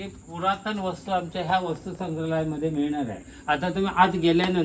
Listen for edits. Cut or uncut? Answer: uncut